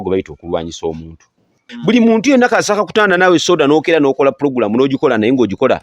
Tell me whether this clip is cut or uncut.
cut